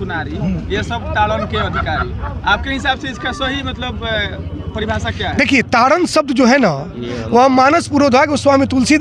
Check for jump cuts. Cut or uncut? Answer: uncut